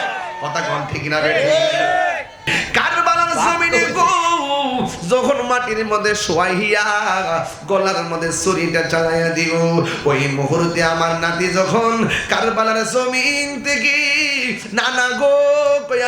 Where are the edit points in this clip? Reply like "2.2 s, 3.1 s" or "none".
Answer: 2.5 s

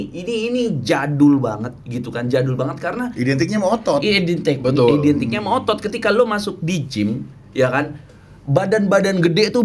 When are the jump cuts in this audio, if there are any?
none

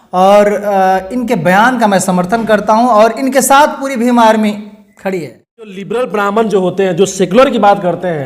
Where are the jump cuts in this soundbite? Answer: 5.8 s

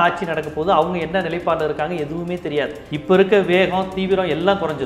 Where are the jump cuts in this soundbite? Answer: 2.9 s

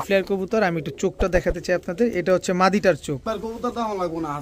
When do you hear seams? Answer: 3.3 s

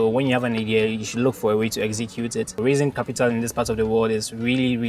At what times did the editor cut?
2.6 s

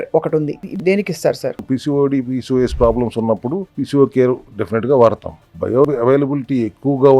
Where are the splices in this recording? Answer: 0.7 s, 1.6 s, 3.7 s, 4.5 s, 5.7 s

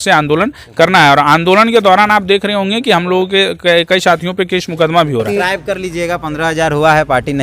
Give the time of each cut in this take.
5.3 s

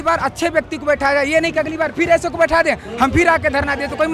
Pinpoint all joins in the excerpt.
none

